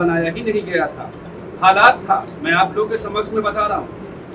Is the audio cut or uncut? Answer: cut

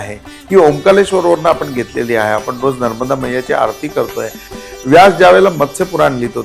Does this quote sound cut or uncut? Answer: cut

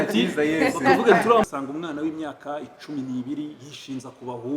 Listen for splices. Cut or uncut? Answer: cut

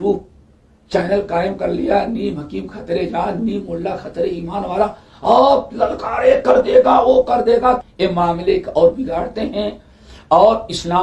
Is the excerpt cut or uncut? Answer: cut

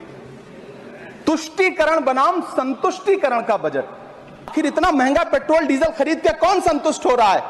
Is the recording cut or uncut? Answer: cut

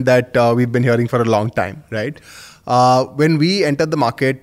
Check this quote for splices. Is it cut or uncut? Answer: uncut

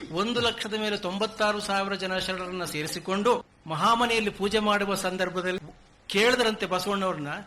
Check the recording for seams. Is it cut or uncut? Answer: cut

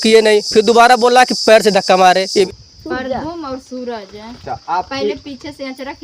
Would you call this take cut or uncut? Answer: cut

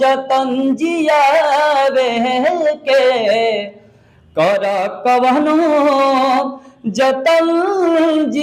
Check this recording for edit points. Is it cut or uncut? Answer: uncut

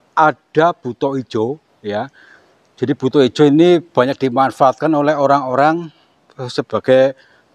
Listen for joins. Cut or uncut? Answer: uncut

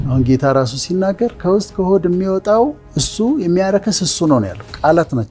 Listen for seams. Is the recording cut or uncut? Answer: uncut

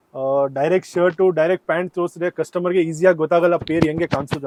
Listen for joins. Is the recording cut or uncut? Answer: uncut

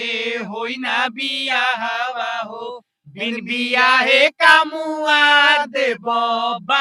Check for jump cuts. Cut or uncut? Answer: uncut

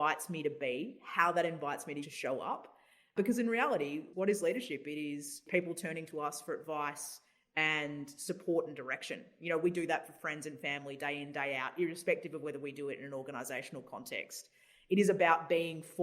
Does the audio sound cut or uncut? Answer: cut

